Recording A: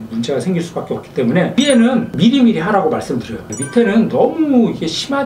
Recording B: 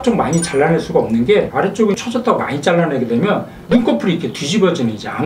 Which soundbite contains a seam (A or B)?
A